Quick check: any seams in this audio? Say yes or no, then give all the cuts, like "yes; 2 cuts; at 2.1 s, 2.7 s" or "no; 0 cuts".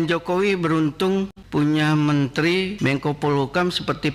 yes; 2 cuts; at 1.4 s, 2.7 s